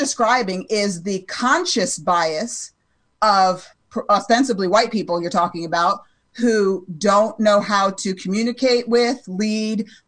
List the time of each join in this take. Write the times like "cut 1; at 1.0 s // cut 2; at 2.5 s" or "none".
none